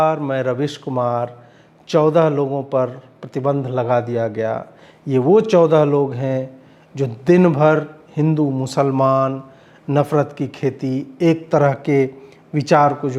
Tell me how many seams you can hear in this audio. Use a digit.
0